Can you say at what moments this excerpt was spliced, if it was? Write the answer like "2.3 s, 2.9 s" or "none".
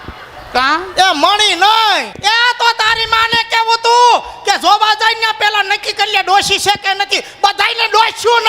2.1 s